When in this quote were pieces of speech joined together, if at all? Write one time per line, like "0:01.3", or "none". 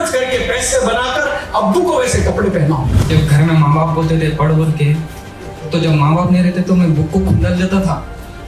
0:03.1